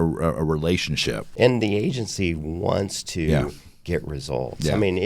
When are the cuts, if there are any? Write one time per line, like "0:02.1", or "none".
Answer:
0:01.2